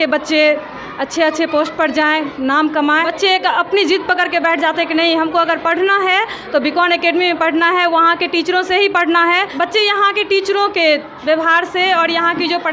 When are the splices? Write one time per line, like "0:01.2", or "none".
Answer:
0:03.1
0:09.5